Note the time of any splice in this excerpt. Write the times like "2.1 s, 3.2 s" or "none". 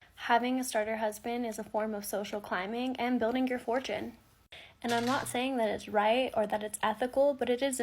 1.4 s